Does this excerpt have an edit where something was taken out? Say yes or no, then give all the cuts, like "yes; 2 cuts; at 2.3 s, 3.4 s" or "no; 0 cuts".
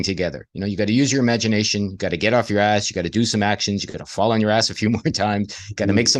no; 0 cuts